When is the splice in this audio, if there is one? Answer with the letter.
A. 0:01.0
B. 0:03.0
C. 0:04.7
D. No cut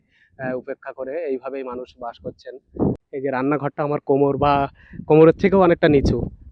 B